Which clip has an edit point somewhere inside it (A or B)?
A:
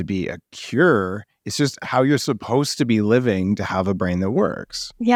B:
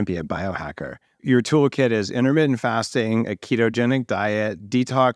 B